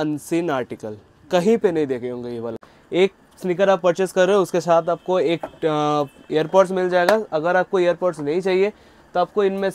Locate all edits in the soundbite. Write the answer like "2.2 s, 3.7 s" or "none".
2.7 s